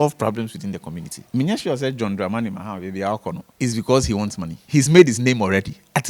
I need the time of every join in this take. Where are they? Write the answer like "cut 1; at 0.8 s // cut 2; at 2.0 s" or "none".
cut 1; at 1.1 s // cut 2; at 3.5 s // cut 3; at 4.5 s